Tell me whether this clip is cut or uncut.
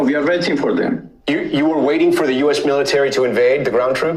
uncut